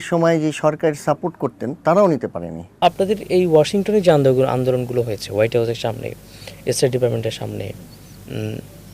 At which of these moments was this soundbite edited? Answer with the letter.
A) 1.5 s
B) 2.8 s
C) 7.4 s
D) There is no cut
B